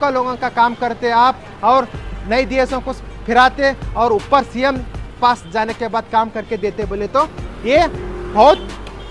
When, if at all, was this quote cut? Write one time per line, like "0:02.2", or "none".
none